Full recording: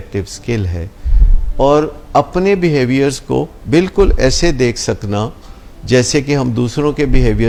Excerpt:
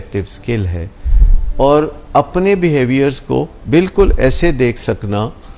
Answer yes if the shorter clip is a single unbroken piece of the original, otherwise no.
yes